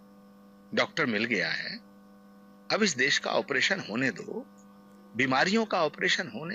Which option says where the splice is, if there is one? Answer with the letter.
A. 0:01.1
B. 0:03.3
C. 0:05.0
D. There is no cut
D